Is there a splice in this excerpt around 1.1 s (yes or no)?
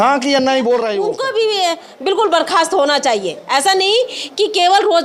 yes